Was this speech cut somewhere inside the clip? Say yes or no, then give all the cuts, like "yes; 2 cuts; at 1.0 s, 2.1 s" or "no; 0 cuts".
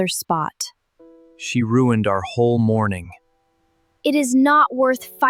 no; 0 cuts